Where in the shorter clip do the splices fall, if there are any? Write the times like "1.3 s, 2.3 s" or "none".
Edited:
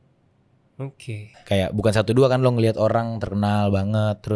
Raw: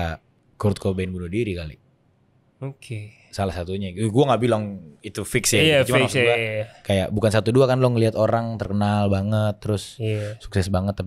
1.3 s